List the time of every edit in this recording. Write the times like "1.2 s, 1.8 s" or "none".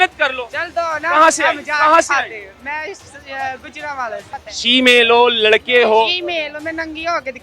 4.3 s

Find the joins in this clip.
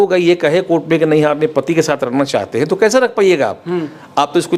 none

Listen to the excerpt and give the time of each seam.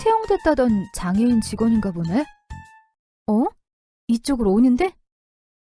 none

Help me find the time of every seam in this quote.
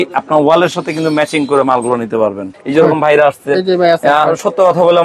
2.5 s

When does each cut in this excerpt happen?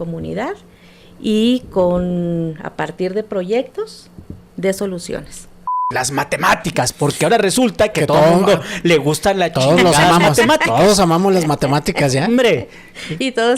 5.8 s

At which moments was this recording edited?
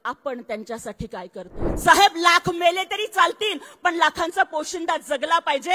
1.6 s

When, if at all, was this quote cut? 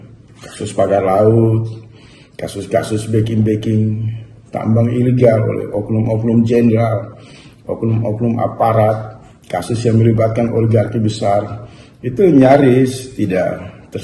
none

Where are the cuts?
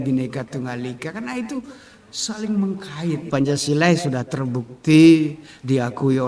3.3 s

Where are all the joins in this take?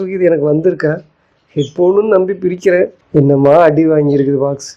3.0 s

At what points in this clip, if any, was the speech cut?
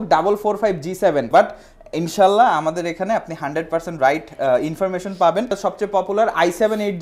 1.3 s, 5.5 s

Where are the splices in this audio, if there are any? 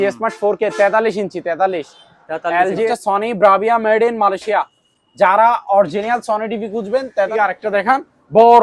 2.9 s, 7.3 s

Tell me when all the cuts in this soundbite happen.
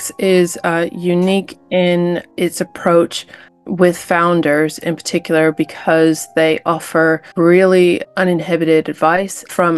none

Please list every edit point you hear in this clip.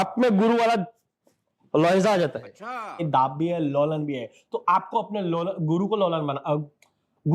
3.0 s

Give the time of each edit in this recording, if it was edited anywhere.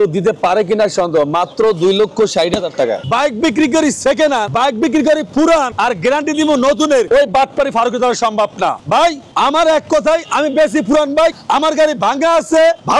3.0 s, 4.5 s, 5.7 s, 7.1 s, 9.0 s

